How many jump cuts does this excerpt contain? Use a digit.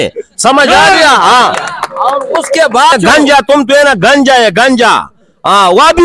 1